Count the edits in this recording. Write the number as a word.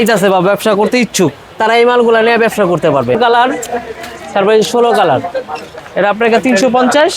one